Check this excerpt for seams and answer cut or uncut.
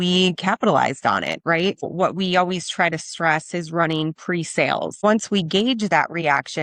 cut